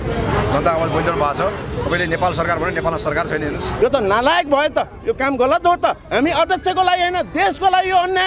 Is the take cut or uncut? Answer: cut